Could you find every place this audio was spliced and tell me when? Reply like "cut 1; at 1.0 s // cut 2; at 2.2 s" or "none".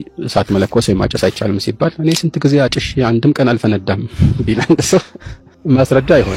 none